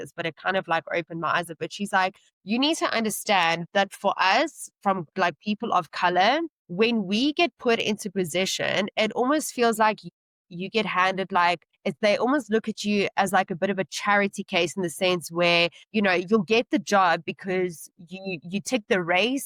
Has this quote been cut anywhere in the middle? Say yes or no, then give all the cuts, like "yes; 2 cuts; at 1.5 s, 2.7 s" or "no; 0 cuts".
no; 0 cuts